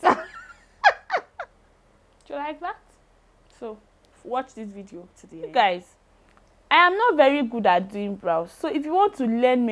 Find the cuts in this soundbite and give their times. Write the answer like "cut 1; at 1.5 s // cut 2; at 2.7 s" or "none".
cut 1; at 1.3 s // cut 2; at 5.2 s